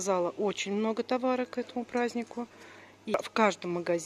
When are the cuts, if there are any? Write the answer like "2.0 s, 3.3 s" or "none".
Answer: 3.1 s